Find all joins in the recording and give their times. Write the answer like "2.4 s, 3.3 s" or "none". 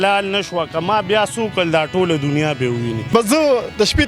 3.1 s